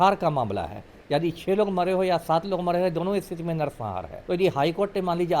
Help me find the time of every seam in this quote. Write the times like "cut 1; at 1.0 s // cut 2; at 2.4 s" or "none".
cut 1; at 4.1 s